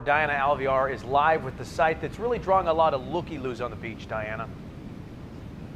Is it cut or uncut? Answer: uncut